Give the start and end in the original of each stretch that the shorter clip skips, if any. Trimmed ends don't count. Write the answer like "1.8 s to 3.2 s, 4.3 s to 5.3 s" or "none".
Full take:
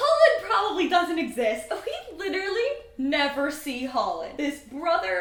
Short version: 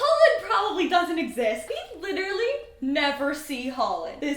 1.6 s to 1.8 s